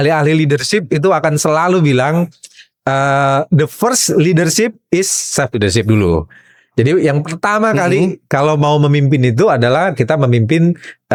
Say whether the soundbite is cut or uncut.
uncut